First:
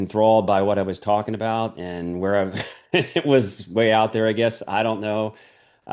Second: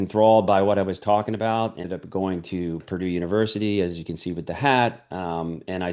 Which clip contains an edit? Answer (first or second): second